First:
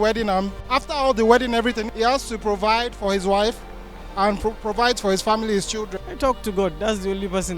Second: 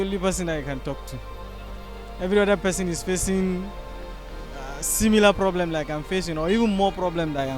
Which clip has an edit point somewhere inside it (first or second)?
first